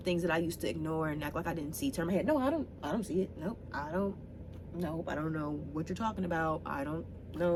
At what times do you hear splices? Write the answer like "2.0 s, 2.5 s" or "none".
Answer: none